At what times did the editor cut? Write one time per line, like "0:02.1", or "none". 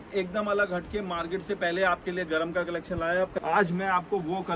0:03.3